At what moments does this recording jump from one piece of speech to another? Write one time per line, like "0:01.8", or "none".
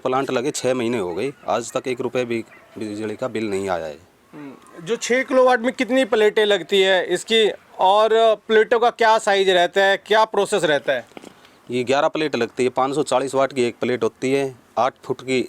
none